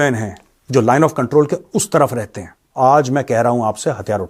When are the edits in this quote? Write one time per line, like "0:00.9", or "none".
0:02.6